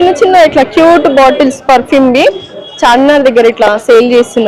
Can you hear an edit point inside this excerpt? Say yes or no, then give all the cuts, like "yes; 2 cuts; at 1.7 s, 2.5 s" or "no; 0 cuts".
no; 0 cuts